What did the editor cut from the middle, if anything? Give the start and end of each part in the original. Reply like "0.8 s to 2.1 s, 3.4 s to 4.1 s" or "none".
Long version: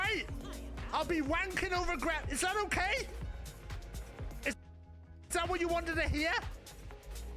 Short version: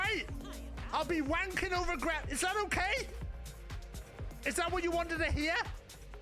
4.5 s to 5.3 s